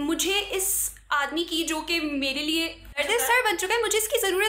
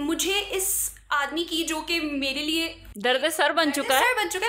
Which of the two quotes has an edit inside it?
first; 1 cut; at 3.0 s

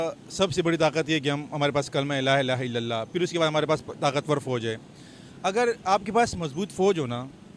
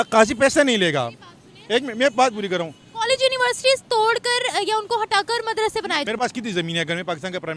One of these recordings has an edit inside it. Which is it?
second; 1 cut; at 6.0 s

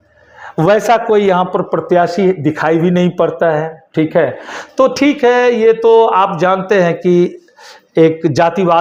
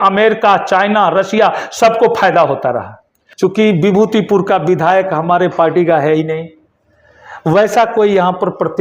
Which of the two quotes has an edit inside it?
second; 1 cut; at 3.2 s

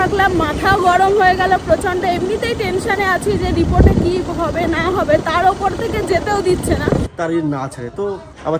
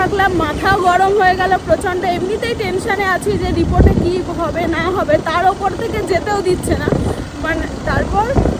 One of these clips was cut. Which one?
first; 1 cut; at 7.1 s

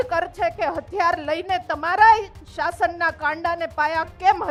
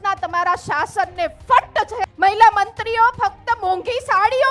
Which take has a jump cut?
second; 1 cut; at 2.0 s

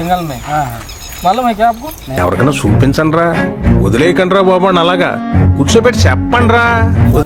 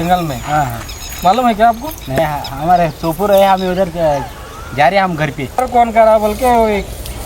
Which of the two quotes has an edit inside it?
second; 2 cuts; at 2.2 s, 5.6 s

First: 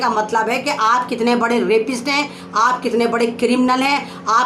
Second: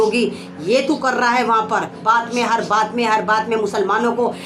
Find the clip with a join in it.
second; 1 cut; at 2.0 s

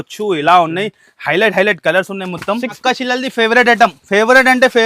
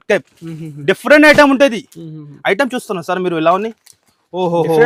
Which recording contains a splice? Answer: first; 1 cut; at 2.7 s

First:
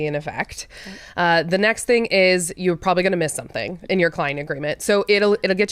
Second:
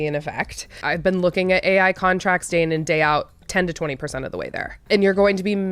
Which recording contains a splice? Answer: second; 2 cuts; at 0.8 s, 4.8 s

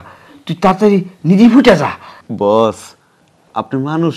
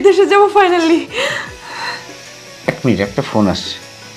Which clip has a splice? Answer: first; 1 cut; at 2.2 s

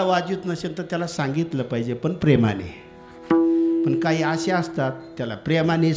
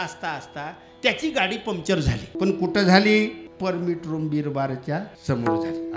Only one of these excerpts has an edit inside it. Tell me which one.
second; 3 cuts; at 2.3 s, 3.5 s, 5.1 s

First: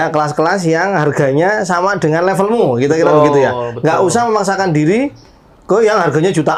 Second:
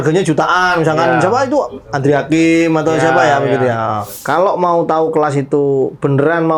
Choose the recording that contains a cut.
second; 1 cut; at 4.1 s

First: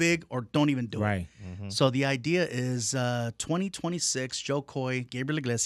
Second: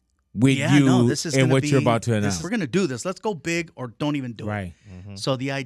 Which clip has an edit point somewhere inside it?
second; 1 cut; at 2.4 s

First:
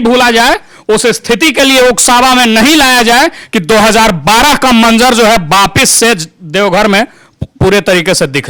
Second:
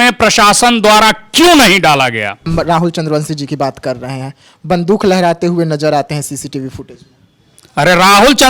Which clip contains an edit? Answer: second; 1 cut; at 2.4 s

